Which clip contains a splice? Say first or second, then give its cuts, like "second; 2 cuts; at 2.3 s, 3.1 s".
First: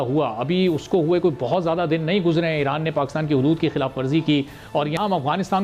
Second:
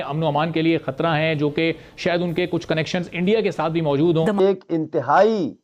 second; 1 cut; at 4.4 s